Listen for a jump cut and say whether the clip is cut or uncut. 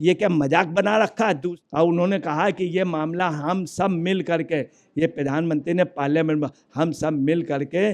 cut